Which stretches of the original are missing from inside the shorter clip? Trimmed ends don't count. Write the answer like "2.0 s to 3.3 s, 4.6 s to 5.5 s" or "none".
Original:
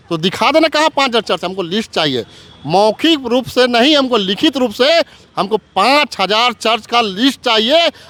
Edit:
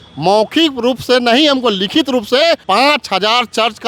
5.1 s to 5.7 s